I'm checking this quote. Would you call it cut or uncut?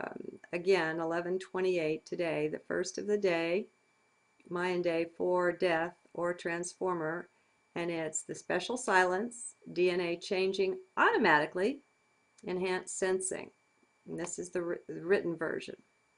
uncut